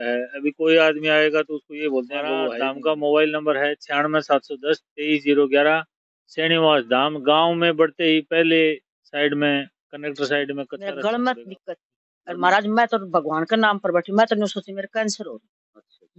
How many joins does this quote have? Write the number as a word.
two